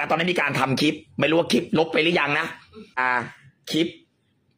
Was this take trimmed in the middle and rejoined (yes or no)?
yes